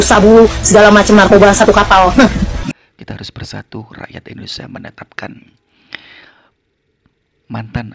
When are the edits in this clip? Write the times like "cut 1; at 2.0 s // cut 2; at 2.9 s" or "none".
cut 1; at 2.6 s